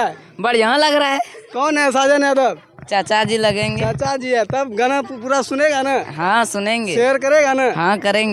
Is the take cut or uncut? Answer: uncut